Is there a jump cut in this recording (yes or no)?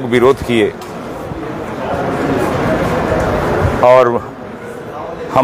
no